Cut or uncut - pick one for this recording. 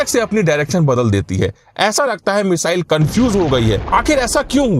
cut